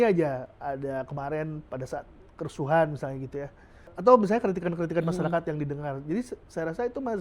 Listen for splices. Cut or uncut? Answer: cut